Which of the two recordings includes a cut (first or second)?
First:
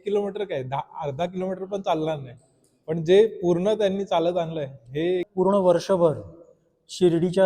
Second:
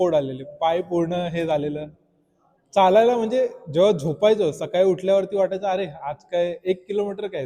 first